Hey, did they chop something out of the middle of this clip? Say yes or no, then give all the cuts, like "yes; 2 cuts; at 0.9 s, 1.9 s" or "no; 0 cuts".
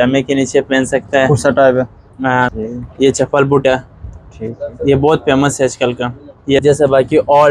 yes; 2 cuts; at 2.6 s, 6.6 s